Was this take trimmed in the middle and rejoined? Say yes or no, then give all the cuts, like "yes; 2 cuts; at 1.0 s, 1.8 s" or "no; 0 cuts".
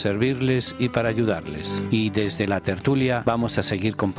no; 0 cuts